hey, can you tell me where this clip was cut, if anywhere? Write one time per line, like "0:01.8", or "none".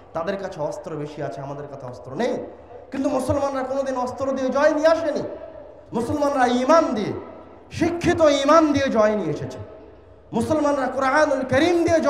none